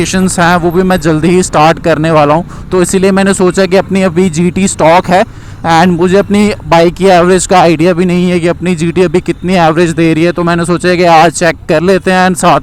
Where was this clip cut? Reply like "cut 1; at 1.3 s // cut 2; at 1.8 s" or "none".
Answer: none